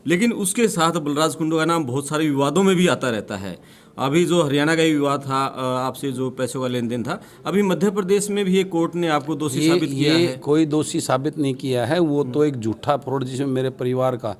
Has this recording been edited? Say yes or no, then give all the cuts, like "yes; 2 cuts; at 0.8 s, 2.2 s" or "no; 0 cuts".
no; 0 cuts